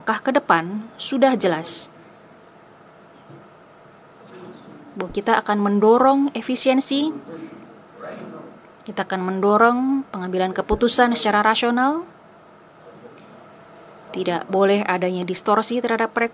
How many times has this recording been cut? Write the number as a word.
two